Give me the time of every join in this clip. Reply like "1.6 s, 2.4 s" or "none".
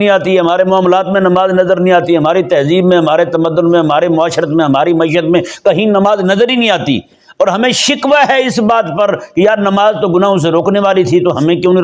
none